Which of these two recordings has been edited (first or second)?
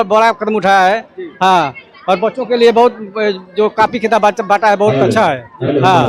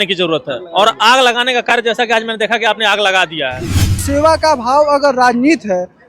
second